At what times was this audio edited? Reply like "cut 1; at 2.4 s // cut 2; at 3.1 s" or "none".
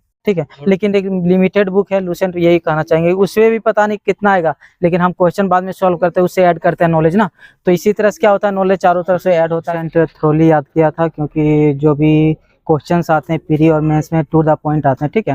cut 1; at 9.8 s